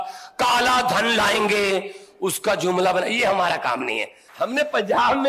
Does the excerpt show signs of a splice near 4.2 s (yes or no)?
yes